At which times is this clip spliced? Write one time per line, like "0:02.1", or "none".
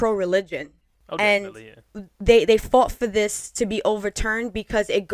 0:01.9